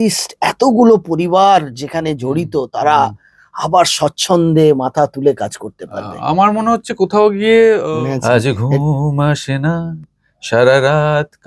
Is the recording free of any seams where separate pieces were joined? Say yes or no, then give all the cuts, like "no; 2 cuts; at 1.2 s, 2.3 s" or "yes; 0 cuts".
no; 1 cut; at 7.8 s